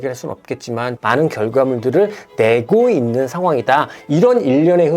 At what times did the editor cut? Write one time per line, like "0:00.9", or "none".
0:00.9
0:04.0